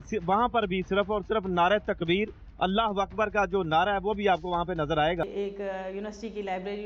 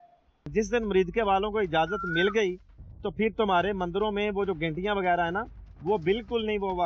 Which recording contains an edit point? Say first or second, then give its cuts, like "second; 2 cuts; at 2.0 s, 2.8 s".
first; 1 cut; at 5.2 s